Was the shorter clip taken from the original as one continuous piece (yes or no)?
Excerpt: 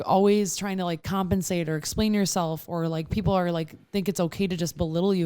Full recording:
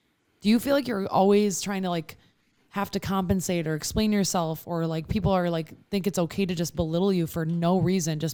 no